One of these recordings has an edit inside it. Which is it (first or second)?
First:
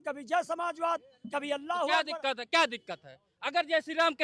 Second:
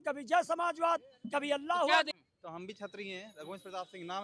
second